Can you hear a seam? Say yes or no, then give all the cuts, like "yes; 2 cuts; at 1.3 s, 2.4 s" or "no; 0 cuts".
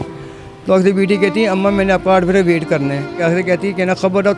yes; 1 cut; at 3.2 s